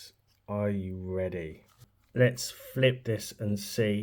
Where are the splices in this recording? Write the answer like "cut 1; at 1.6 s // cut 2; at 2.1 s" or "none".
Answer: cut 1; at 1.8 s